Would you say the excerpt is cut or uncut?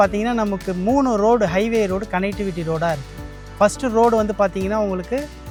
uncut